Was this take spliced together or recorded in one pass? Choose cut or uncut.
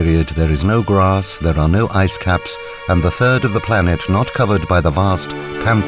uncut